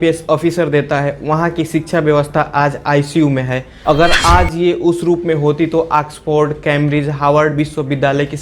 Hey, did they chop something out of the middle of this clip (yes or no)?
yes